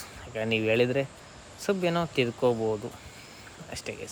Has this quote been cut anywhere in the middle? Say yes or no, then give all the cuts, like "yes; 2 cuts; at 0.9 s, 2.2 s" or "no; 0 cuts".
no; 0 cuts